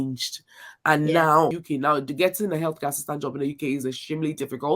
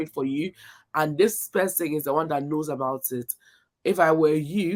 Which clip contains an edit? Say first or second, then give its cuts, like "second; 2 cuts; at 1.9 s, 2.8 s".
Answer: first; 1 cut; at 1.6 s